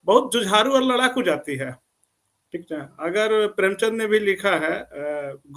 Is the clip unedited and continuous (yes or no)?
yes